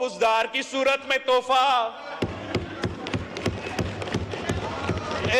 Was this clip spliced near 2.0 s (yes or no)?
no